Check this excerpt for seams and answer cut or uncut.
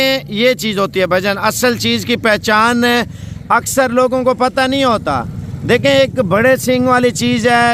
uncut